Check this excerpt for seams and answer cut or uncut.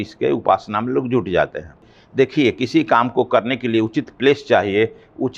cut